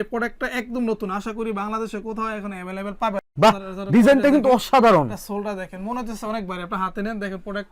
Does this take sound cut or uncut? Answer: cut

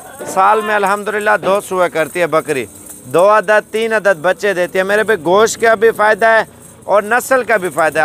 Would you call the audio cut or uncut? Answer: uncut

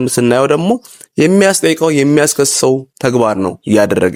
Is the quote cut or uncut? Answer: uncut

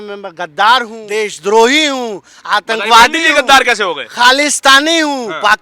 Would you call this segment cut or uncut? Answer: cut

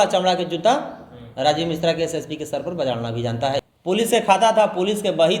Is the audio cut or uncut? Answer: cut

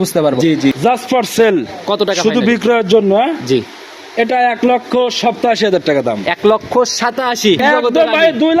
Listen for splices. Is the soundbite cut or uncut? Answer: cut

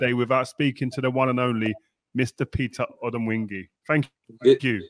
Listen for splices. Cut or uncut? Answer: uncut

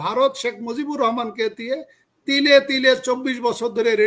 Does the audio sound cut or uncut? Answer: uncut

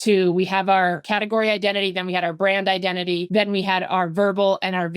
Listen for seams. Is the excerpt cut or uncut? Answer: cut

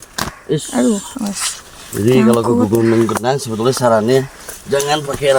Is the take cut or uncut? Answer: uncut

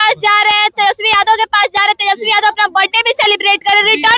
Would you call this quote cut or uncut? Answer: uncut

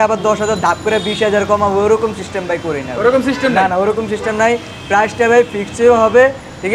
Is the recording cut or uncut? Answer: uncut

